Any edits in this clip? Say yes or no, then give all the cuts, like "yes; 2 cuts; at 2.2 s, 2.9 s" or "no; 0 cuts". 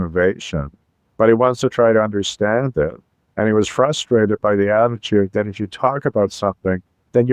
no; 0 cuts